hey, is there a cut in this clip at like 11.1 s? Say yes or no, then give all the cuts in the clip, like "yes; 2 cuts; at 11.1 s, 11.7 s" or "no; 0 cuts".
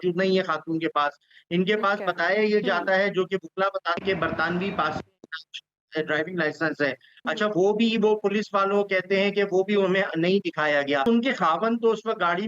yes; 1 cut; at 11.1 s